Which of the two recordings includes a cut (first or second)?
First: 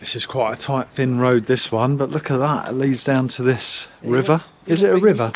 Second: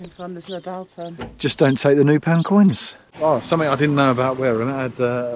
second